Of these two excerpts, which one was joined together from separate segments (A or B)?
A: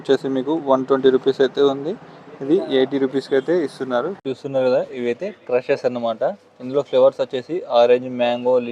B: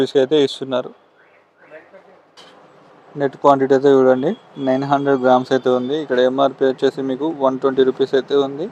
A